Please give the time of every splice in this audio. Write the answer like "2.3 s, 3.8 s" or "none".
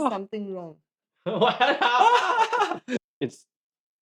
2.9 s